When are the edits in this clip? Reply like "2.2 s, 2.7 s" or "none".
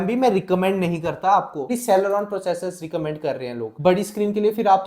1.8 s, 3.7 s